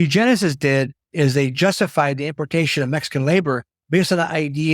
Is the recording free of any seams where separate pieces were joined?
no; 2 cuts; at 1.0 s, 3.7 s

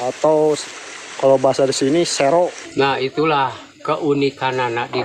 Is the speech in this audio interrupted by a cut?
yes; 1 cut; at 2.6 s

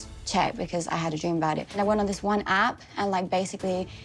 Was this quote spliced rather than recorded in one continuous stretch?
yes; 1 cut; at 1.8 s

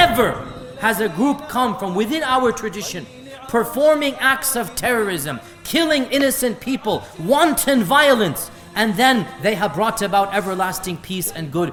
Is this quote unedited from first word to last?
yes; 0 cuts

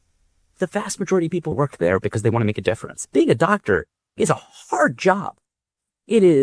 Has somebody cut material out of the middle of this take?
yes; 2 cuts; at 1.5 s, 2.9 s

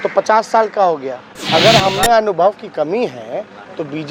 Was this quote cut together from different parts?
yes; 1 cut; at 1.3 s

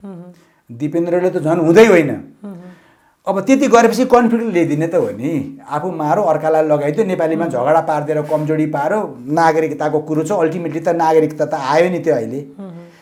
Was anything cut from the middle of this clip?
no; 0 cuts

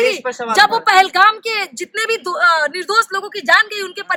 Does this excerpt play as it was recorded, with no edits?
yes; 0 cuts

